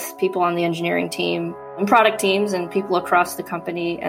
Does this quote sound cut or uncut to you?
cut